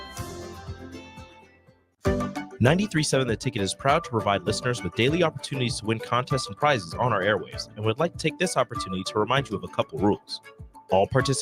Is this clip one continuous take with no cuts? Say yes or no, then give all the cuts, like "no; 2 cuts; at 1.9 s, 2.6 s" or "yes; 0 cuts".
no; 1 cut; at 1.8 s